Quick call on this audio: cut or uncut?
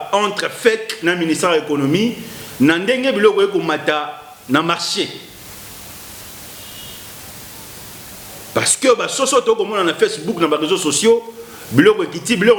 uncut